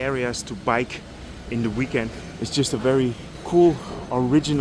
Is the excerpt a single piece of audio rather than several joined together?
no; 2 cuts; at 2.2 s, 3.3 s

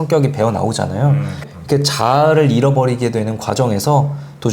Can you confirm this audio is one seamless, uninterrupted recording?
no; 1 cut; at 1.5 s

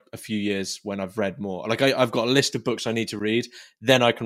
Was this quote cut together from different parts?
no; 0 cuts

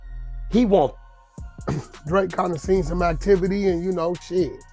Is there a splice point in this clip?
yes; 1 cut; at 1.1 s

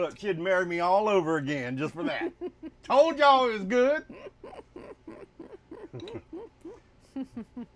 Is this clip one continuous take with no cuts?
yes; 0 cuts

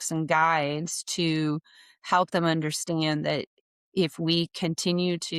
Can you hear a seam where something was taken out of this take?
no; 0 cuts

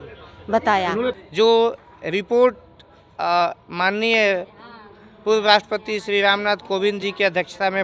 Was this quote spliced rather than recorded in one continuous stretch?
yes; 1 cut; at 1.2 s

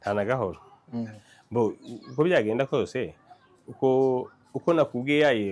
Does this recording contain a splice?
no; 0 cuts

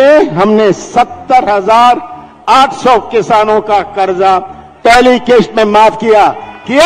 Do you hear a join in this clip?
no; 0 cuts

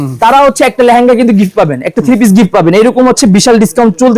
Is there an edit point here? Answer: no; 0 cuts

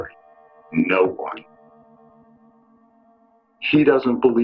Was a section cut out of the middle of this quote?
no; 0 cuts

